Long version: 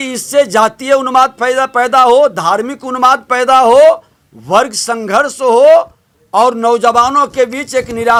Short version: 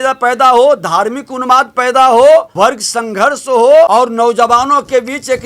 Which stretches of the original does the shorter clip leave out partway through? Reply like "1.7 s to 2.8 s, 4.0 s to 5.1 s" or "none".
4.0 s to 4.4 s, 5.8 s to 6.3 s